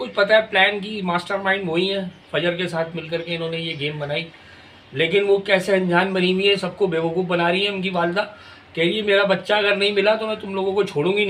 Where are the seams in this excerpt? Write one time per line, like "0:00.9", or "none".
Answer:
none